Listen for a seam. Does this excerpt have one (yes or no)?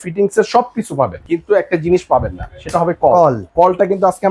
yes